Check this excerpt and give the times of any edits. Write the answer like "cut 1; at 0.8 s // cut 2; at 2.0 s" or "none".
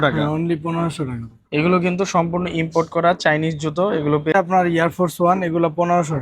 cut 1; at 4.3 s